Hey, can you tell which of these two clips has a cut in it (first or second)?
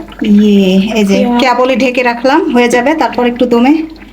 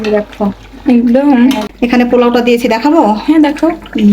second